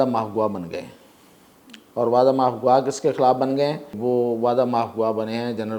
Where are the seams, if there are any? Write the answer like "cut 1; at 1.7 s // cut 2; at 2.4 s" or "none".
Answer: cut 1; at 3.9 s